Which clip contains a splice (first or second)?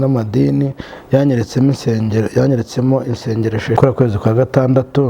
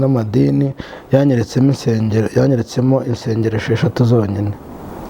first